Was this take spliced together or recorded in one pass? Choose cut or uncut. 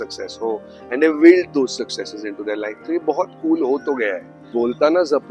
cut